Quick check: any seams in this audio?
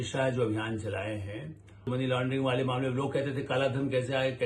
yes; 1 cut; at 1.9 s

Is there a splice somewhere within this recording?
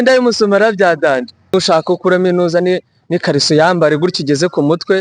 yes; 1 cut; at 1.5 s

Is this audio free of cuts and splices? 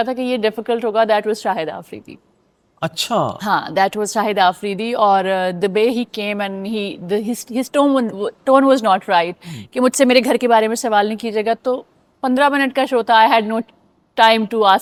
yes; 0 cuts

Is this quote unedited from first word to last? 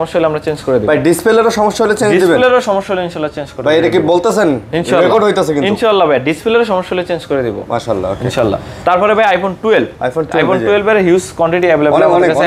yes; 0 cuts

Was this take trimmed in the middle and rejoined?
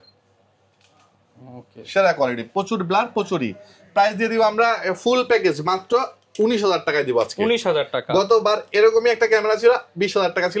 no; 0 cuts

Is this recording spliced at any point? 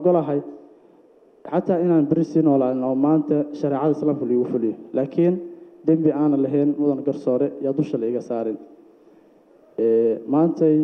no; 0 cuts

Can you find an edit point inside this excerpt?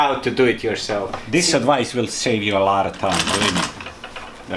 yes; 1 cut; at 1.2 s

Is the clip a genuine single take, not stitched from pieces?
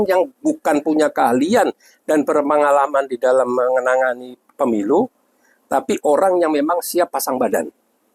yes; 0 cuts

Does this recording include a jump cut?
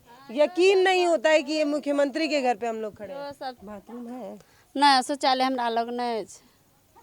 yes; 1 cut; at 3.6 s

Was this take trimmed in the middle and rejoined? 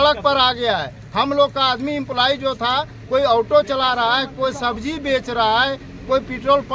no; 0 cuts

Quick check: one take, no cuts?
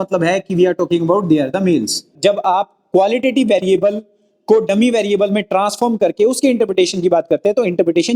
no; 1 cut; at 2.1 s

